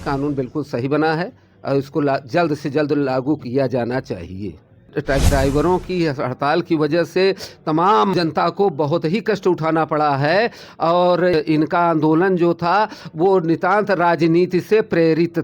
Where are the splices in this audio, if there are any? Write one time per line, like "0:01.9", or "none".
0:04.9
0:08.1
0:11.3